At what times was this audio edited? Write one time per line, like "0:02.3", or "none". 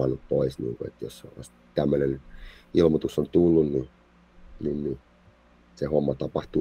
none

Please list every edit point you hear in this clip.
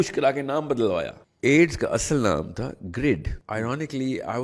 0:01.2
0:03.4

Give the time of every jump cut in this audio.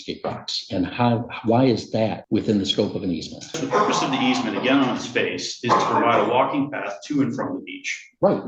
0:02.2
0:03.6

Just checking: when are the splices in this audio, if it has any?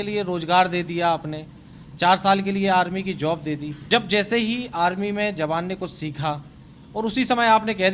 0:03.7

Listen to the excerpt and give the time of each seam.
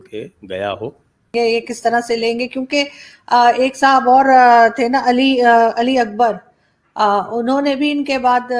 0:01.3

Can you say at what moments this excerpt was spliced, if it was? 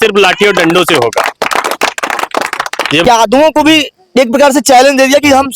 0:03.0

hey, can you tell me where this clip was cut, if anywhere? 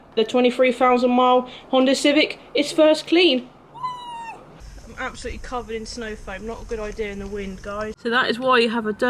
0:04.7
0:08.0

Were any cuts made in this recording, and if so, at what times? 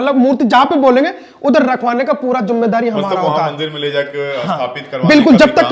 none

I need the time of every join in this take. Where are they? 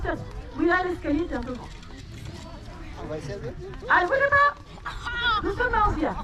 none

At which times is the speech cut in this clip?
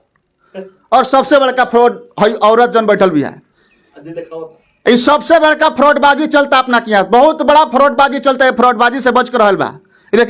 none

